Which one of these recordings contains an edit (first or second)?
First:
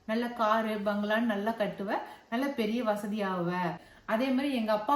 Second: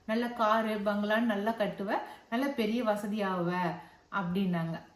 first